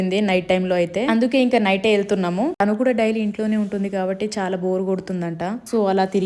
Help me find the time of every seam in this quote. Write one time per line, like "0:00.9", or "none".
none